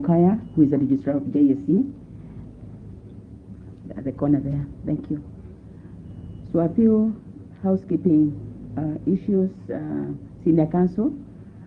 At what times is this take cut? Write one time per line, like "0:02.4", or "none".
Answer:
none